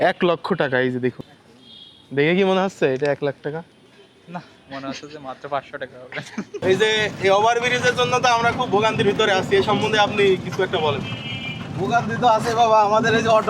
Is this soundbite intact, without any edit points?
no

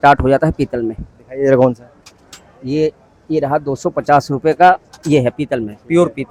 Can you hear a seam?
no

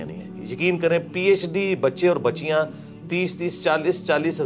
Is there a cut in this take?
no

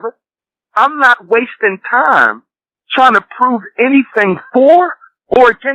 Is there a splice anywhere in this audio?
no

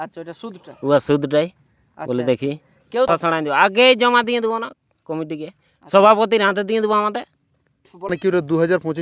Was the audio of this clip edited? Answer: yes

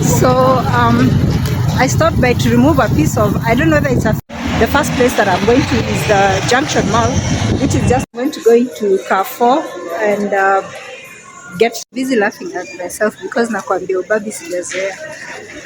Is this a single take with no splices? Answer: no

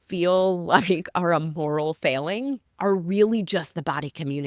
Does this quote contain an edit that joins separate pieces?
yes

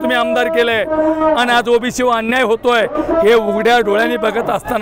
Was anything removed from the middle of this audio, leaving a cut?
no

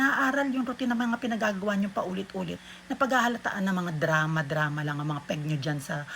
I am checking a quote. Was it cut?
yes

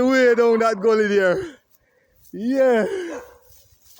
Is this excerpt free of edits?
yes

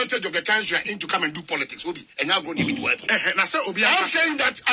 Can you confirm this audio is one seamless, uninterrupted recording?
no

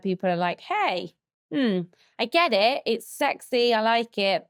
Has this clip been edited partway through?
no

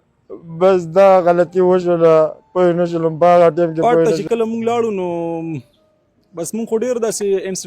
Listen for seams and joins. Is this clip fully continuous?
no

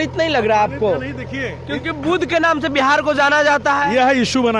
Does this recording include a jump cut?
no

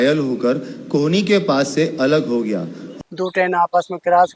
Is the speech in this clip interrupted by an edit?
yes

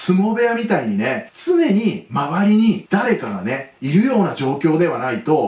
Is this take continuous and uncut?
yes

